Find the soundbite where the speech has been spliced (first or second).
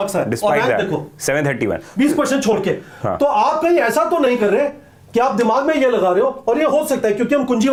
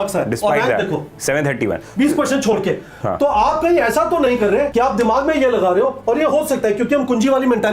second